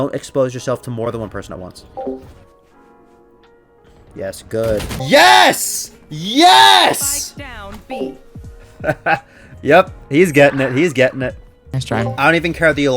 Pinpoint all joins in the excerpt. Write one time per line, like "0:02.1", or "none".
0:01.1
0:05.0